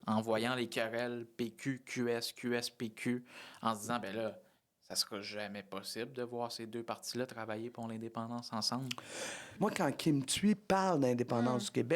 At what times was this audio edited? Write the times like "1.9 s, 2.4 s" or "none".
9.5 s